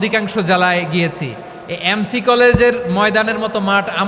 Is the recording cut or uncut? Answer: uncut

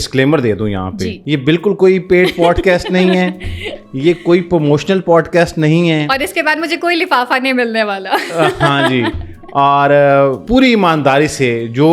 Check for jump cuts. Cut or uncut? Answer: cut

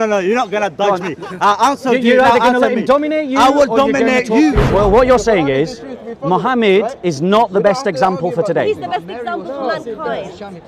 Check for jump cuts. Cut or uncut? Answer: cut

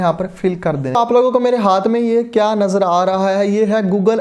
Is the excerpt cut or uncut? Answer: cut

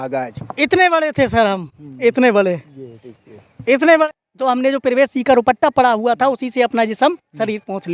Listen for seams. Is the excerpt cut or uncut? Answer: cut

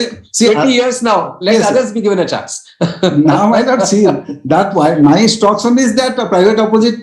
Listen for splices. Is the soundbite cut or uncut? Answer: uncut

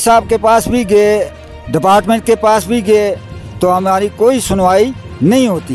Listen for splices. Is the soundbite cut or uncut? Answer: uncut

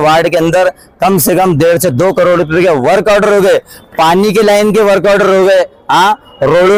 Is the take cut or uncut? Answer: uncut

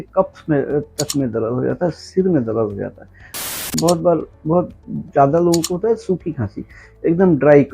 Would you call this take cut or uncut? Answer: cut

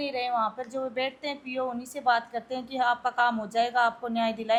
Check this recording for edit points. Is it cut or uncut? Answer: uncut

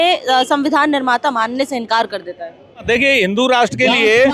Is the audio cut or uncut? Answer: cut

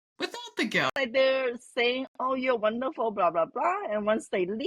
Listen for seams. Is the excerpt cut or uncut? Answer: cut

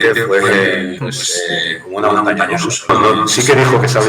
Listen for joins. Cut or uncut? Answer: cut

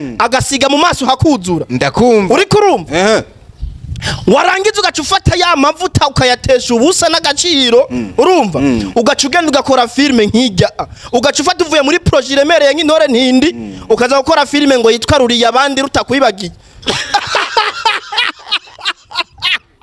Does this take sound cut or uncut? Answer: uncut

